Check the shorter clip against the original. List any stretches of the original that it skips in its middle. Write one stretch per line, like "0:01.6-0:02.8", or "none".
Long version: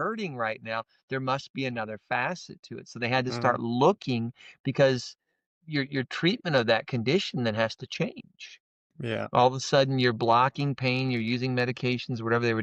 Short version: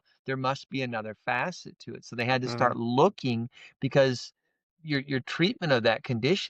none

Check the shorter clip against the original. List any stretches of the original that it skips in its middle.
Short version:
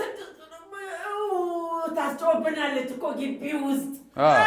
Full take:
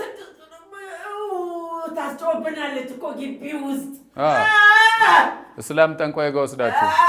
none

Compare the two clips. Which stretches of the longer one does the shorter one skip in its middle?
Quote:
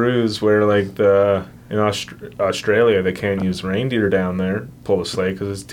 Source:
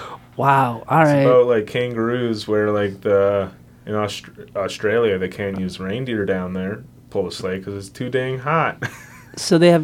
0:03.6-0:03.7
0:06.9-0:07.0

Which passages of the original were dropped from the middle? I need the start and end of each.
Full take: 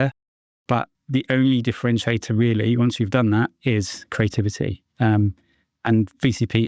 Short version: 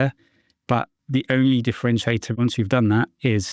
0:02.4-0:02.8

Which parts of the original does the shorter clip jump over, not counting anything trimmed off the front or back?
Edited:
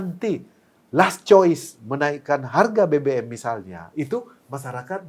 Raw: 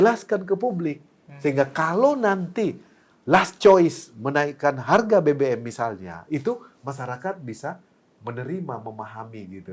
none

